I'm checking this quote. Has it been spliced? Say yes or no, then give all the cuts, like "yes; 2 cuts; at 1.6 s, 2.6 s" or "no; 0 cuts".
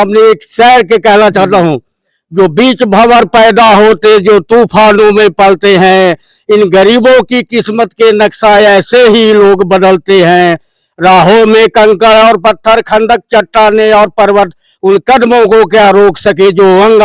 no; 0 cuts